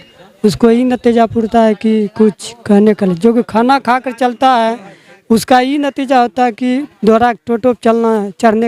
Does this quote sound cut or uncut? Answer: uncut